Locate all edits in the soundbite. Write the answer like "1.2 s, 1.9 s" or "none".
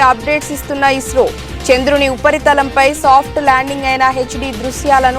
none

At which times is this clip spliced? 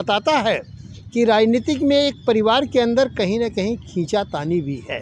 none

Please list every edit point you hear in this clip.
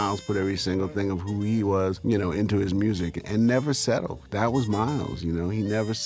2.0 s, 3.2 s, 4.2 s

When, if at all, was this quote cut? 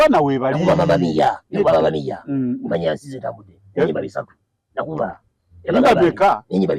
none

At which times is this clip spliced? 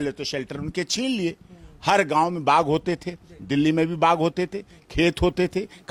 none

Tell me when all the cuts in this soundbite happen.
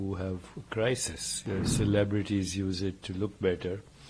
1.3 s

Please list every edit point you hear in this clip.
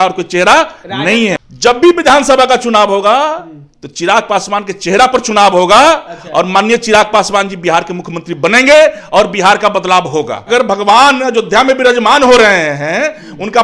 1.4 s, 10.4 s

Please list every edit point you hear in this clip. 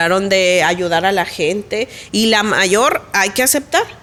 none

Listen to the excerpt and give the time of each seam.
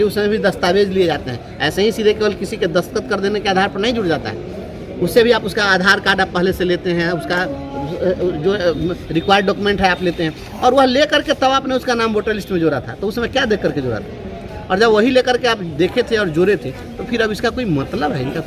none

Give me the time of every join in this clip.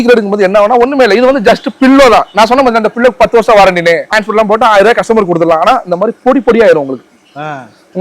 4.2 s

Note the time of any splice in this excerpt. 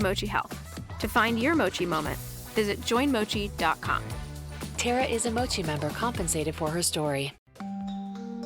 7.4 s

